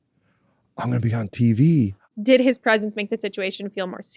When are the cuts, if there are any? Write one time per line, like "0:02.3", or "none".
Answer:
0:02.1